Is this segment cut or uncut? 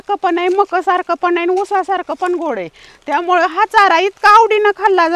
uncut